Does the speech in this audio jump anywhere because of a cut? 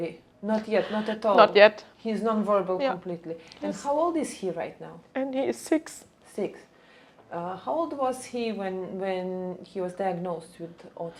no; 0 cuts

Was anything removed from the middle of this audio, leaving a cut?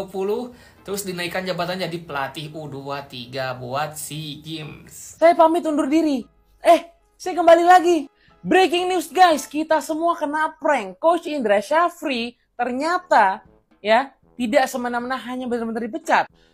yes; 1 cut; at 4.6 s

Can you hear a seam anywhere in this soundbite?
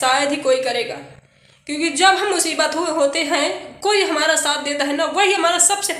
no; 0 cuts

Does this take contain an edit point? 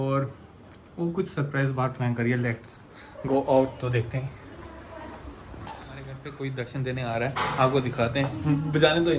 yes; 1 cut; at 6.3 s

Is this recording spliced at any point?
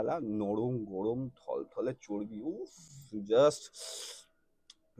no; 0 cuts

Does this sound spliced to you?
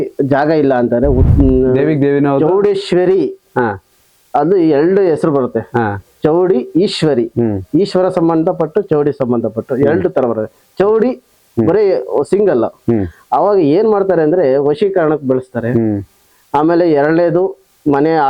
yes; 1 cut; at 1.2 s

